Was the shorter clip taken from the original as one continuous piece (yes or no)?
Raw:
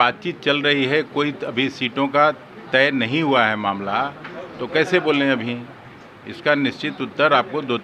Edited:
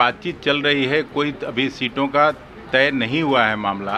yes